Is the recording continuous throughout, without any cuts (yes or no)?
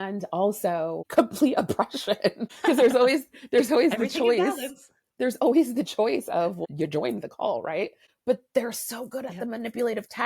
no